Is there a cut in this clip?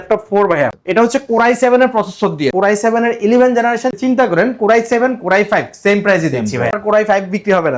yes; 3 cuts; at 2.5 s, 4.0 s, 6.8 s

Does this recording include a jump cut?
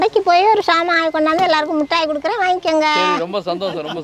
no; 0 cuts

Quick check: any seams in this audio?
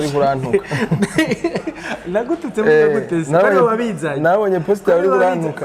no; 0 cuts

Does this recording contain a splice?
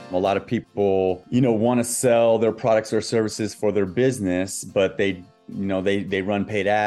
yes; 1 cut; at 1.2 s

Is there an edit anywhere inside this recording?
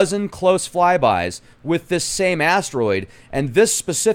no; 0 cuts

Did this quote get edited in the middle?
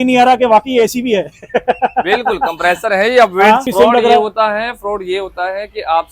yes; 1 cut; at 3.7 s

